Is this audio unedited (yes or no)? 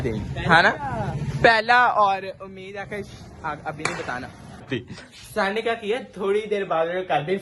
no